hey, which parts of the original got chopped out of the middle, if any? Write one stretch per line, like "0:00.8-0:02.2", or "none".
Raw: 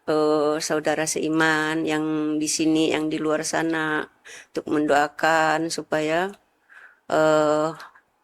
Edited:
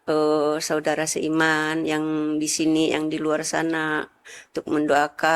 none